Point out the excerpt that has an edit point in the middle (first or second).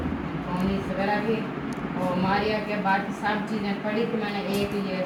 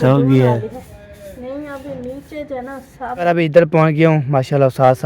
second